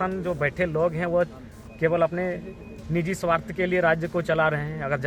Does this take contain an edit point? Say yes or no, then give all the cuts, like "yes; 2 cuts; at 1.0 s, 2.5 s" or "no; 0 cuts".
no; 0 cuts